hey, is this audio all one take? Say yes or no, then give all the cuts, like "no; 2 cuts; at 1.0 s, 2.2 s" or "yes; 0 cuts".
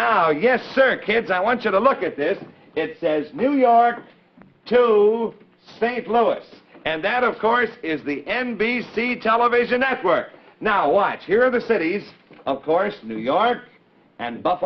no; 1 cut; at 5.1 s